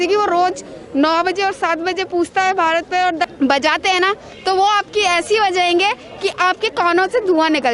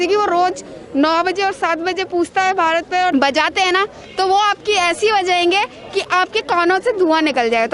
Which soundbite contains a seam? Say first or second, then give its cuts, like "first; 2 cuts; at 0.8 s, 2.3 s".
second; 1 cut; at 3.1 s